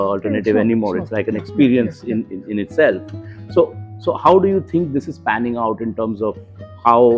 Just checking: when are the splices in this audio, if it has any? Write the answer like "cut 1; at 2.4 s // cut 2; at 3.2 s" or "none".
none

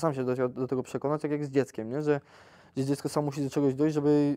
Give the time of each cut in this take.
none

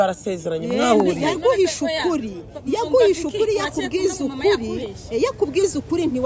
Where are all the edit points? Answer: none

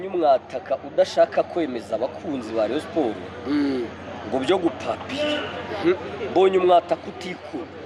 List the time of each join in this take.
none

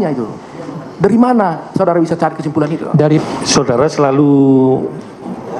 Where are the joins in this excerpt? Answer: cut 1; at 3.2 s

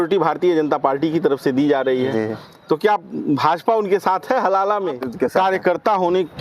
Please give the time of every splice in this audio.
cut 1; at 5.0 s

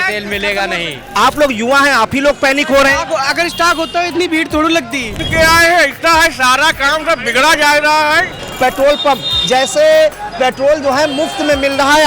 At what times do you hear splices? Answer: cut 1; at 1.0 s // cut 2; at 5.2 s // cut 3; at 8.4 s

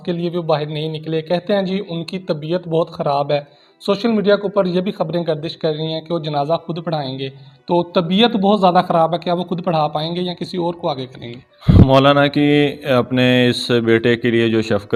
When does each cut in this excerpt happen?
none

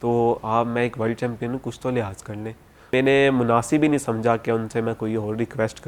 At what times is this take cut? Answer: cut 1; at 2.9 s

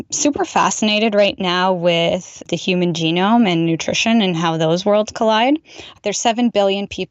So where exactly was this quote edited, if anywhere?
cut 1; at 2.4 s // cut 2; at 5.9 s

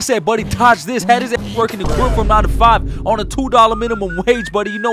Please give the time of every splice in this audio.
none

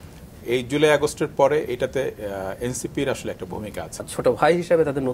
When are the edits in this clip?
cut 1; at 4.0 s

